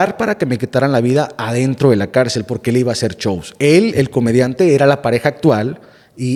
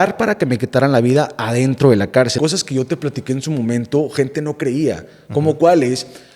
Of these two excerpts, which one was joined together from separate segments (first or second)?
second